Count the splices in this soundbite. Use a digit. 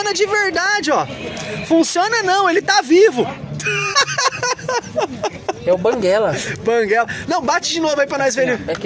0